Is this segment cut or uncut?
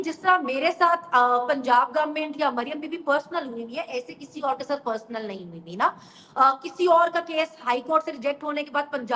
uncut